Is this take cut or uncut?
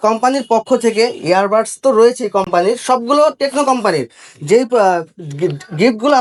uncut